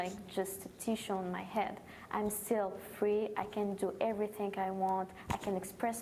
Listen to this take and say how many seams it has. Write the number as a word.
zero